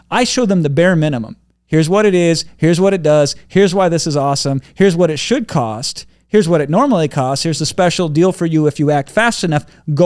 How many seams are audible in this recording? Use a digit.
0